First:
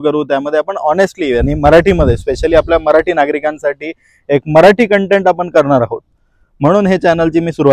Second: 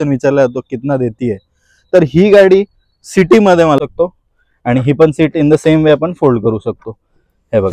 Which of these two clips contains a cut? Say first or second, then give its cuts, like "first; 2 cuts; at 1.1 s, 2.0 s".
second; 1 cut; at 3.8 s